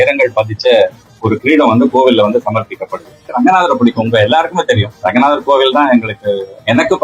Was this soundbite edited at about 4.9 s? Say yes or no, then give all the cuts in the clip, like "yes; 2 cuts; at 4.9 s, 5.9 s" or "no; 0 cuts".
yes; 2 cuts; at 3.3 s, 4.9 s